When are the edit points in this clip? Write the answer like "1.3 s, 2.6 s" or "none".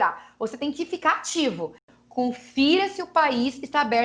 1.8 s